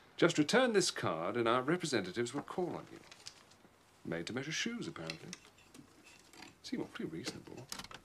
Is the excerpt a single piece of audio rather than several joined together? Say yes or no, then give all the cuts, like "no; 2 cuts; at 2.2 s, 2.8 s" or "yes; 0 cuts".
yes; 0 cuts